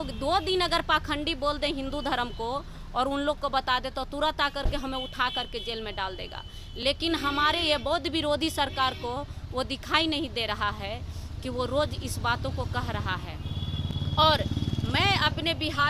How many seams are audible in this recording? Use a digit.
0